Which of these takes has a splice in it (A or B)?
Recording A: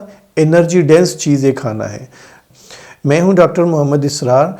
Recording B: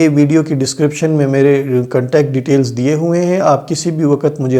A